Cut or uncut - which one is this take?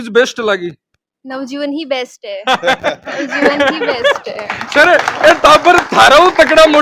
uncut